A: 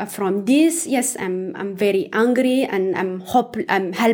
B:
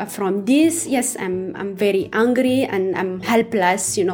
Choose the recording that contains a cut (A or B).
B